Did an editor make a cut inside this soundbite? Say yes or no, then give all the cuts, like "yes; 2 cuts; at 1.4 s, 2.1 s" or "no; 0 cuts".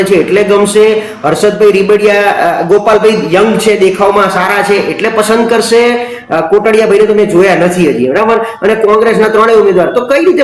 no; 0 cuts